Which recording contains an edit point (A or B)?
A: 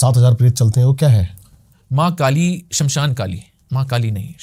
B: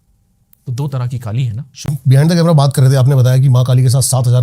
B